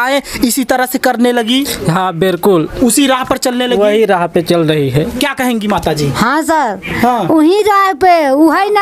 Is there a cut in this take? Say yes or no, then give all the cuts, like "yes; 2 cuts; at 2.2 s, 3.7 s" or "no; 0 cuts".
no; 0 cuts